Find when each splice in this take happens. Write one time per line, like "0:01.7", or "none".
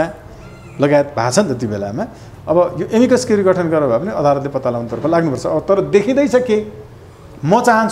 none